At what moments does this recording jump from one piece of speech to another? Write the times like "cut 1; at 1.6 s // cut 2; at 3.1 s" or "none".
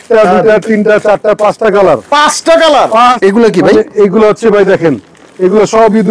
cut 1; at 3.2 s